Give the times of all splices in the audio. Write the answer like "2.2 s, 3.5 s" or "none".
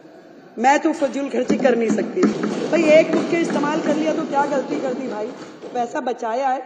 2.4 s